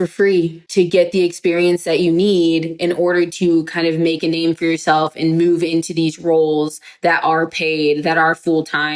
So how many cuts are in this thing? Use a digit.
0